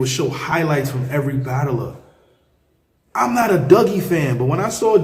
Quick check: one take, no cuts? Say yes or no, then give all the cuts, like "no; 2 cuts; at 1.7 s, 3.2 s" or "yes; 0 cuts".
no; 1 cut; at 2.4 s